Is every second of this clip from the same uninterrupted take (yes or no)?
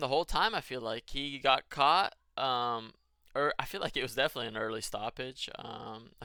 yes